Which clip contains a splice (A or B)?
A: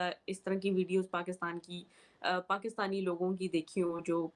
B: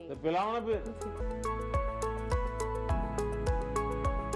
B